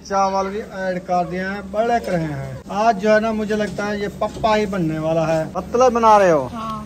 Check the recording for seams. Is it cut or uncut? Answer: cut